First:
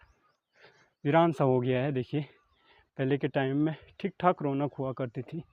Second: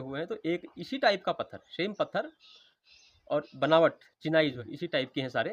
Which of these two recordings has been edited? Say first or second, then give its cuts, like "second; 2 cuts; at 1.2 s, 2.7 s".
second; 1 cut; at 4.6 s